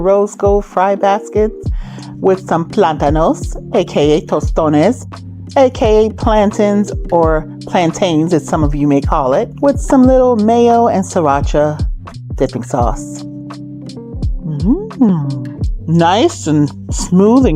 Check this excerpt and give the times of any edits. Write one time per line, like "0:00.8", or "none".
0:13.0
0:14.3